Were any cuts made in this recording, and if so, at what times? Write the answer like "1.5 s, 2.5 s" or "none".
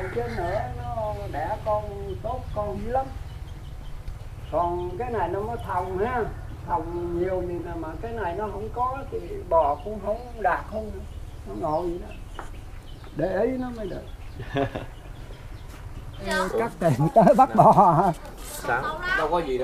16.3 s